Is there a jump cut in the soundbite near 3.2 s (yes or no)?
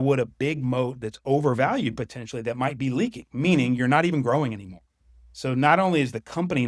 no